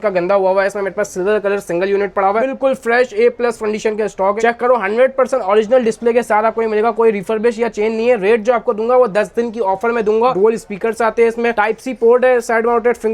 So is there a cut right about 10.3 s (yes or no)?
yes